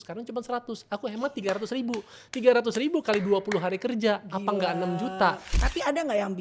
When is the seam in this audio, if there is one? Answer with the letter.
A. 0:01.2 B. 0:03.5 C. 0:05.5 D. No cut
C